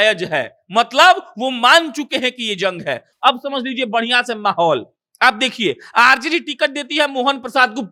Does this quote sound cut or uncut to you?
uncut